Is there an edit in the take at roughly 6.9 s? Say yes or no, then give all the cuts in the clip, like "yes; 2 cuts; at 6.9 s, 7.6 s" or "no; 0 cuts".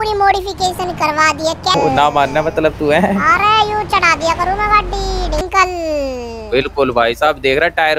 no; 2 cuts; at 1.7 s, 5.4 s